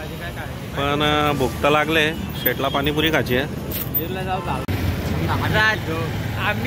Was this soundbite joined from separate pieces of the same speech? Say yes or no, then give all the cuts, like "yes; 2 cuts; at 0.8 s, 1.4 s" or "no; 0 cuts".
yes; 1 cut; at 4.6 s